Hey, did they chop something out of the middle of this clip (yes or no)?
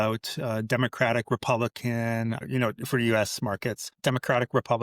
yes